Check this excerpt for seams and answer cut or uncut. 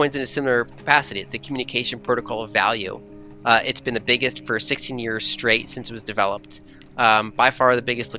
uncut